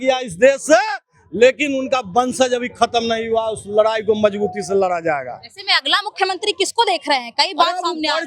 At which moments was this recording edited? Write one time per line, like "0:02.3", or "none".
none